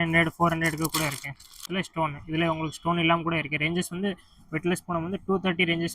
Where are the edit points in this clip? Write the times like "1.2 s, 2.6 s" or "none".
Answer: 1.5 s